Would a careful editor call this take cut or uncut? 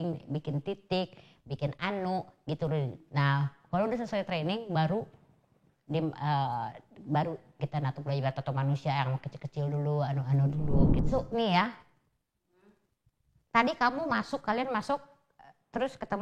cut